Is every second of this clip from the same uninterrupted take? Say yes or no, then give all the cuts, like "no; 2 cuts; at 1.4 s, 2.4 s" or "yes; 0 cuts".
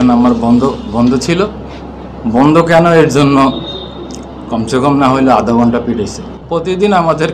yes; 0 cuts